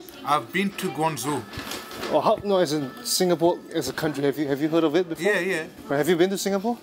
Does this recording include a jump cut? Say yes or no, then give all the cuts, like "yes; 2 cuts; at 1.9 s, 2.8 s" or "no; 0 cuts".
no; 0 cuts